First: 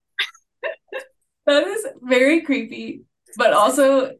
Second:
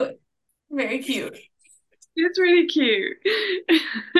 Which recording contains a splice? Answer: first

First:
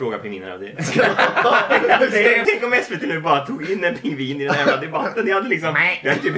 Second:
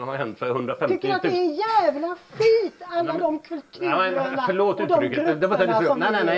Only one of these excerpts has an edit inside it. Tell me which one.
first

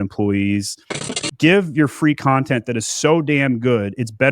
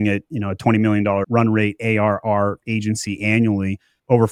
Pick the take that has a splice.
first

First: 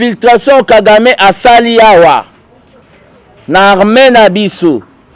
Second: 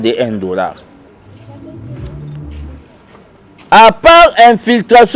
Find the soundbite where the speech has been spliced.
second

